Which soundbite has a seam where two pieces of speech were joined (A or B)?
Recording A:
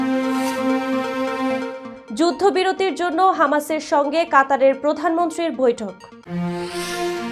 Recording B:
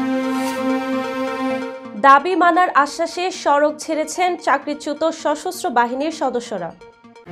B